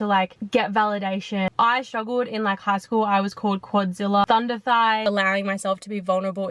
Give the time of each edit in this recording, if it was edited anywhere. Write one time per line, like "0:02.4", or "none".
0:01.5
0:04.2
0:05.0

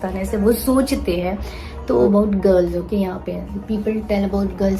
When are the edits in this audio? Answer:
0:02.1

